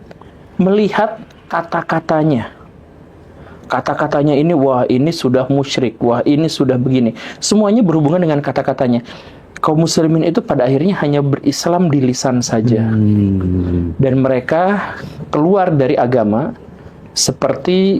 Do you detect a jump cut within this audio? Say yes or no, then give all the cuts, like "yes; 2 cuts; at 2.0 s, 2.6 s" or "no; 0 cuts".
yes; 1 cut; at 9.2 s